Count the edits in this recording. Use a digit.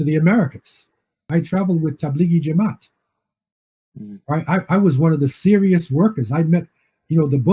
1